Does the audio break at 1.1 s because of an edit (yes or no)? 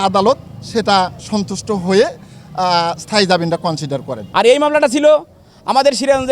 no